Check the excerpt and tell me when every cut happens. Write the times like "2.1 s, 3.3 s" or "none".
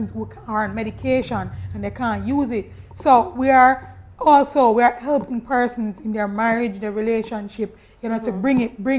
none